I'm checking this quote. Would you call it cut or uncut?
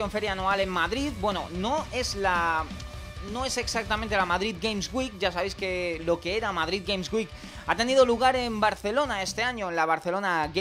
uncut